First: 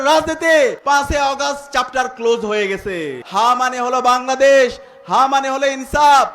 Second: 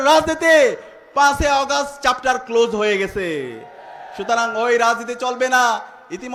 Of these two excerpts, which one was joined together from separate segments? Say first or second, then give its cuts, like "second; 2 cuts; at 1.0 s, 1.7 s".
first; 2 cuts; at 0.8 s, 3.2 s